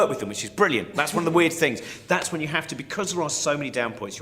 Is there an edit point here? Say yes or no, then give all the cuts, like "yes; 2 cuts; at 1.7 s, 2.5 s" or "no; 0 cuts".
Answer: yes; 1 cut; at 1.5 s